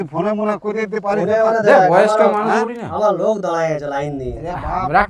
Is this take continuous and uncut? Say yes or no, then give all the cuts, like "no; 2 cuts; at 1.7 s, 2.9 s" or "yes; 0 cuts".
yes; 0 cuts